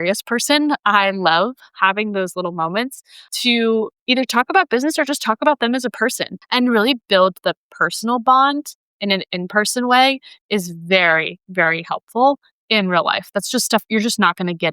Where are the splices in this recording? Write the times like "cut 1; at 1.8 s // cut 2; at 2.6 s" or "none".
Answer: cut 1; at 3.3 s // cut 2; at 6.3 s